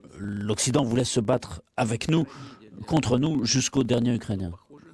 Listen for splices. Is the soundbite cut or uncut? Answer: uncut